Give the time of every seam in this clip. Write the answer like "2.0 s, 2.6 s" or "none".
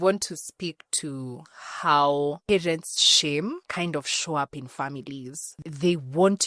3.6 s, 5.6 s